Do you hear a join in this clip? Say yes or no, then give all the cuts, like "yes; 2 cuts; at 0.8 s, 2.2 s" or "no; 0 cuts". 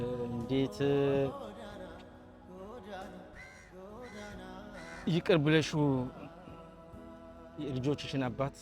yes; 3 cuts; at 1.3 s, 3.1 s, 5.0 s